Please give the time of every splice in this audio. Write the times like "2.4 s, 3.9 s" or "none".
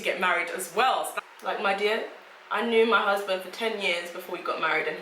1.1 s